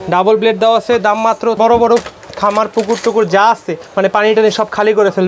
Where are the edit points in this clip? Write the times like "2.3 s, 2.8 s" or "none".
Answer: 1.6 s